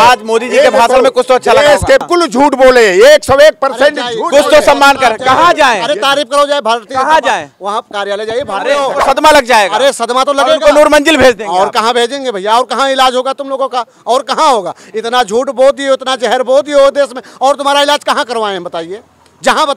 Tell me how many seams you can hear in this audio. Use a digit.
2